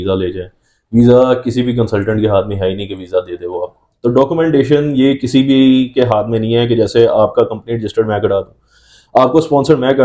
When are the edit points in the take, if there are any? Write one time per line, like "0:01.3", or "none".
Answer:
0:03.8